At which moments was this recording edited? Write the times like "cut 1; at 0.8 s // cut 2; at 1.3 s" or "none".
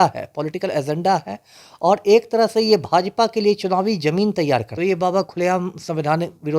cut 1; at 4.7 s